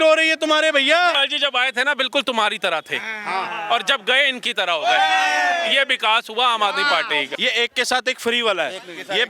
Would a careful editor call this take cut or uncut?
cut